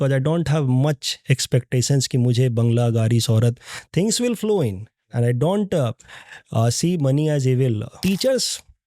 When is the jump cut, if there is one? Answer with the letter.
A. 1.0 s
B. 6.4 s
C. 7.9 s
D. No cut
C